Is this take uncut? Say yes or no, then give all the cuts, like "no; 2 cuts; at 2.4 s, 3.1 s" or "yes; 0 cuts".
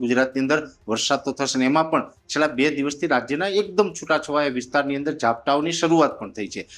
yes; 0 cuts